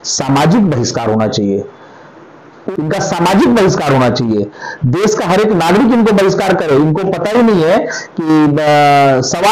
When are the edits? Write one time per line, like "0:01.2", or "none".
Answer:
0:02.6